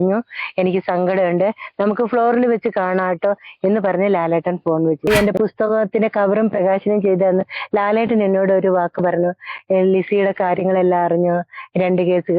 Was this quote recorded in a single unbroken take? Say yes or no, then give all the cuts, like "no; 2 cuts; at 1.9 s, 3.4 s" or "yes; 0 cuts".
no; 1 cut; at 5.1 s